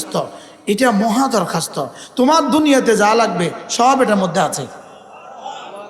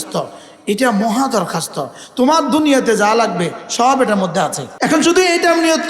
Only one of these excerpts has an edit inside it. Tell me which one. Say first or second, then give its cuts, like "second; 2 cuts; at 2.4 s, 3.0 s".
second; 1 cut; at 4.6 s